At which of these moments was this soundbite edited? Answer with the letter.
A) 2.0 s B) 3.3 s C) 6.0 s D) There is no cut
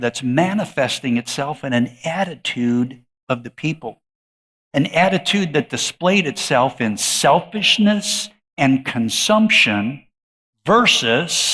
D